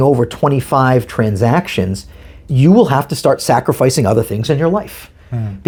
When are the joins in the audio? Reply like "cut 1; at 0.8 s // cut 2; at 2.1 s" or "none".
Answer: none